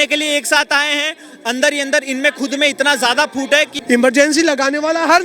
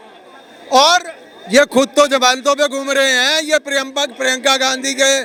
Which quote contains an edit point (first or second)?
first